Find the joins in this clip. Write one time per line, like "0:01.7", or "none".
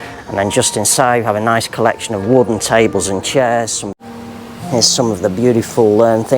0:03.8